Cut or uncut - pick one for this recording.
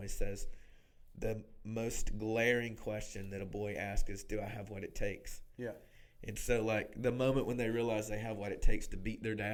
uncut